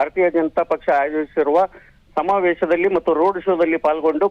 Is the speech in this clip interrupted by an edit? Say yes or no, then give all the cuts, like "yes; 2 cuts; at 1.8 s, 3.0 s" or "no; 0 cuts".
yes; 1 cut; at 1.8 s